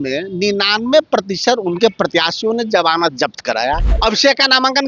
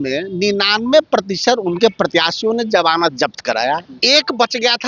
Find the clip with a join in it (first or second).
first